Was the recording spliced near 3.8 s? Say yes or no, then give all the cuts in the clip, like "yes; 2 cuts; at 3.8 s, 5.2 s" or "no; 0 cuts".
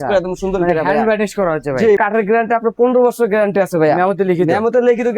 no; 1 cut; at 2.0 s